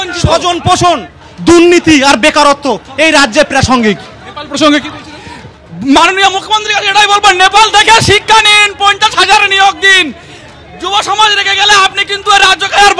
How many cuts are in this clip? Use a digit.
0